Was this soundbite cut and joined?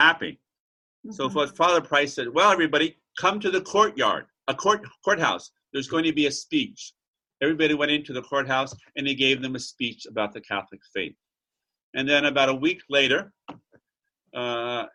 no; 0 cuts

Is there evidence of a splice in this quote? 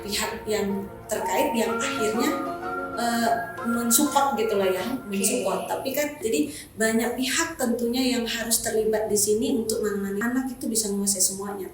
yes; 2 cuts; at 6.2 s, 10.2 s

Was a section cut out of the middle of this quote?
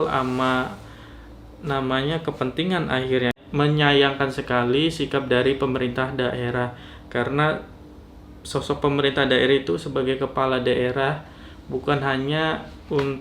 yes; 1 cut; at 3.4 s

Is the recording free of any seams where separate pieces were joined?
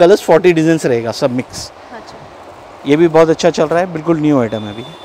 yes; 0 cuts

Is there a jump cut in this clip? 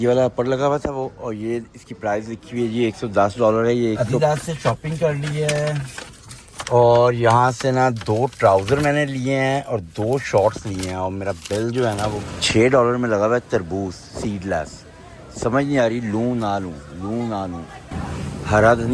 yes; 3 cuts; at 4.1 s, 12.2 s, 17.8 s

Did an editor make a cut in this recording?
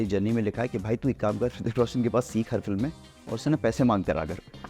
no; 0 cuts

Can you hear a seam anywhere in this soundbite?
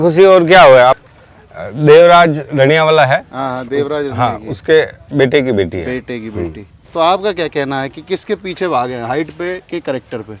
yes; 2 cuts; at 1.0 s, 6.8 s

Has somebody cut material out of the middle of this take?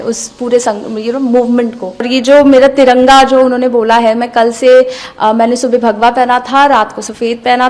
yes; 1 cut; at 2.1 s

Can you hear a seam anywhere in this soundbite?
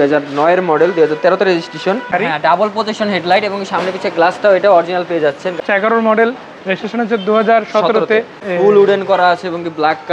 yes; 3 cuts; at 2.1 s, 5.6 s, 8.5 s

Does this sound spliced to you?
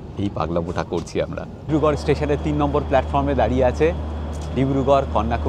yes; 1 cut; at 1.7 s

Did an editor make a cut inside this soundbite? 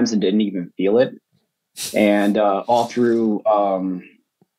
no; 0 cuts

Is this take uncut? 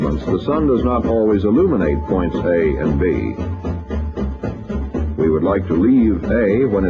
no; 1 cut; at 4.6 s

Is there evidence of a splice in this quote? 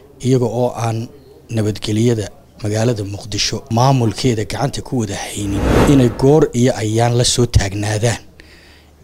yes; 2 cuts; at 3.7 s, 5.7 s

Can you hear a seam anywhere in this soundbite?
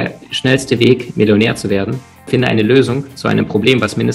no; 0 cuts

